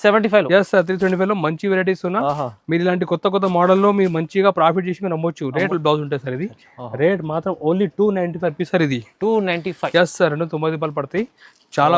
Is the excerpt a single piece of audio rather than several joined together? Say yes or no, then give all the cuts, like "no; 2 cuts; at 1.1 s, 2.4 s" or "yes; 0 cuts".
no; 1 cut; at 5.7 s